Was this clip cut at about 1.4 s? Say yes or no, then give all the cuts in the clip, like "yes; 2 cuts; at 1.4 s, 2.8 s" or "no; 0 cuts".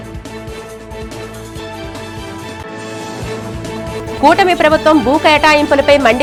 no; 0 cuts